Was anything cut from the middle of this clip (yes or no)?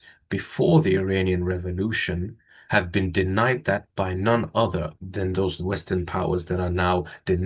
no